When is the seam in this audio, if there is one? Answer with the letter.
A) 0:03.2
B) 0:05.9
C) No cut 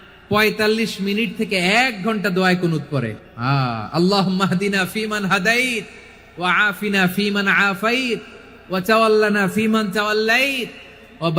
A